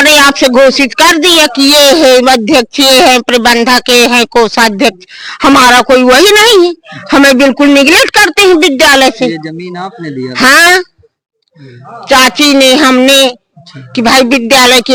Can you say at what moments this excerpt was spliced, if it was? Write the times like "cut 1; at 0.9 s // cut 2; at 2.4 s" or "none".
none